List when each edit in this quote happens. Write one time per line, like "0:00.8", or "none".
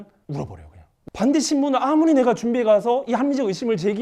0:01.0